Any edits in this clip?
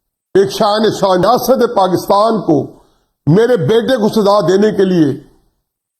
yes; 1 cut; at 1.2 s

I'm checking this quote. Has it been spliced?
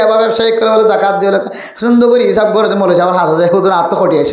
no; 0 cuts

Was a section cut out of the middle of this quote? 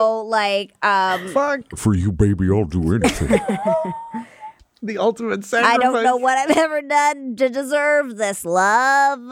yes; 2 cuts; at 1.8 s, 5.6 s

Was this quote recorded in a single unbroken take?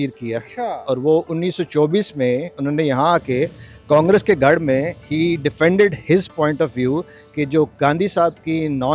yes; 0 cuts

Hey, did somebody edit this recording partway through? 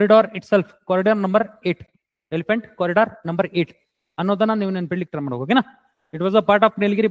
no; 0 cuts

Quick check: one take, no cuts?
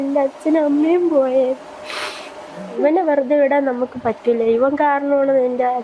yes; 0 cuts

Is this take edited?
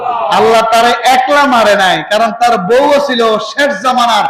no; 0 cuts

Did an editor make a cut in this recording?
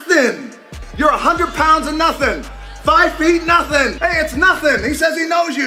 no; 0 cuts

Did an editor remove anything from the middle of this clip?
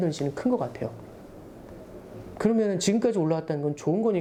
no; 0 cuts

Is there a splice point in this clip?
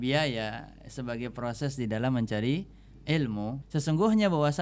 yes; 1 cut; at 3.6 s

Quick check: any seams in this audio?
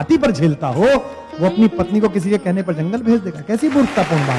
no; 0 cuts

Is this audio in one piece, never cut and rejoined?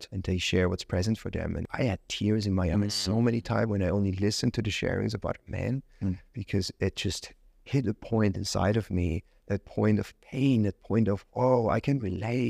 no; 1 cut; at 1.6 s

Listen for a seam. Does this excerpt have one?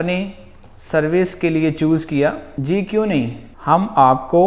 yes; 2 cuts; at 2.5 s, 3.5 s

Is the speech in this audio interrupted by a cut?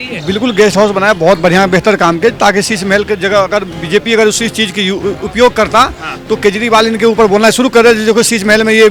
no; 0 cuts

